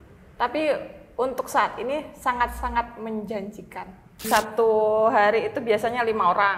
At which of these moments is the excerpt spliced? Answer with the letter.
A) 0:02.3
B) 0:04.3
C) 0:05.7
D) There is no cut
B